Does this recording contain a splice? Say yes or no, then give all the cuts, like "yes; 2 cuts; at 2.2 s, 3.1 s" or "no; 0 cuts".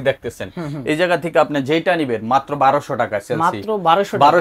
no; 0 cuts